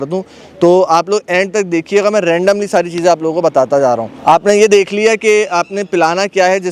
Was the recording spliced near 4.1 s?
no; 0 cuts

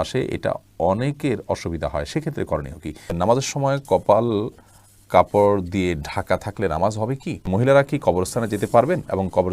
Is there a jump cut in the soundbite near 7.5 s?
yes; 2 cuts; at 3.2 s, 7.5 s

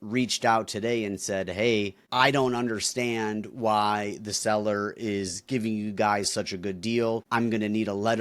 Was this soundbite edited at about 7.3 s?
yes; 2 cuts; at 2.0 s, 7.3 s

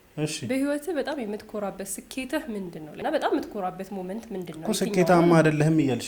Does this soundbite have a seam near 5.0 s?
no; 1 cut; at 2.9 s

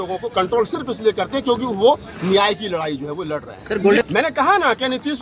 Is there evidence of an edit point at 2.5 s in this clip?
no; 1 cut; at 4.0 s

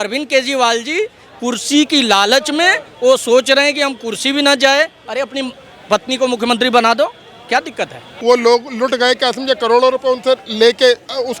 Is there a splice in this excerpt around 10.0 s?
no; 1 cut; at 8.1 s

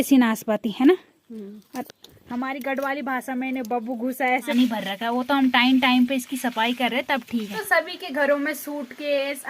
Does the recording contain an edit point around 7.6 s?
yes; 2 cuts; at 4.5 s, 7.6 s

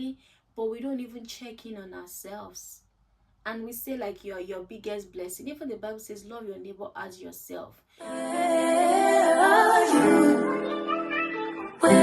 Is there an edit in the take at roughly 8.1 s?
yes; 1 cut; at 8.1 s

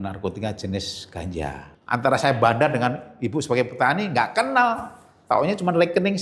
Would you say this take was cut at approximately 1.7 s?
yes; 1 cut; at 1.7 s

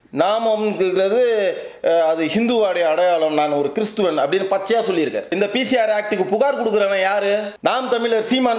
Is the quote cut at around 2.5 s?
no; 2 cuts; at 5.3 s, 7.5 s

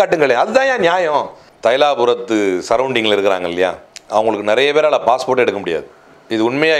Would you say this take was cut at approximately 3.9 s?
yes; 2 cuts; at 1.4 s, 3.9 s

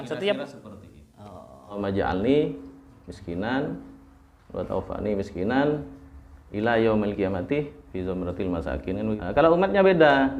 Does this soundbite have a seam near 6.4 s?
no; 2 cuts; at 1.8 s, 9.2 s

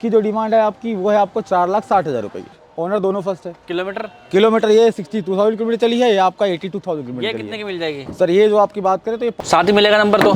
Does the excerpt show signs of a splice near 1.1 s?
no; 2 cuts; at 2.5 s, 9.4 s

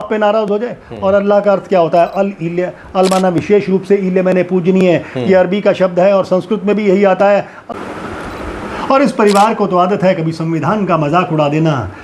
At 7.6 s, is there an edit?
yes; 1 cut; at 7.6 s

